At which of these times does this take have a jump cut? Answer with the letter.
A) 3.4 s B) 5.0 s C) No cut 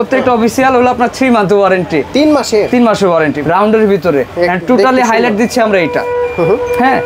A